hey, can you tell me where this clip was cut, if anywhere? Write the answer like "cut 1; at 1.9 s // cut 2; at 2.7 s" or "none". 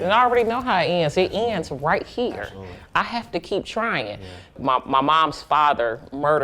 cut 1; at 4.6 s

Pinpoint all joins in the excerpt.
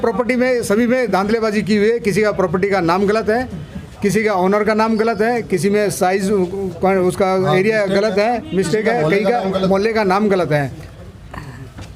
cut 1; at 11.0 s

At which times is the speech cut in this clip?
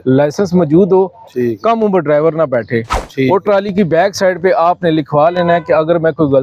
none

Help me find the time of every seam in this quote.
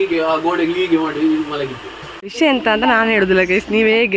cut 1; at 2.3 s

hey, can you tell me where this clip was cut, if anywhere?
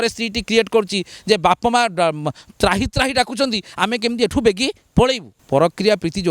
cut 1; at 5.3 s

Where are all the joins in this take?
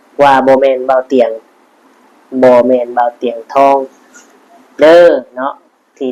none

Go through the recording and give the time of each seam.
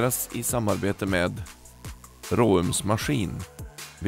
none

